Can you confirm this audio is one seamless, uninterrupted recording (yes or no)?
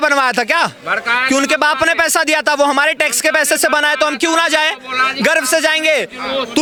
yes